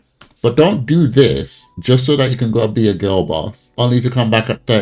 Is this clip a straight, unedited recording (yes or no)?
yes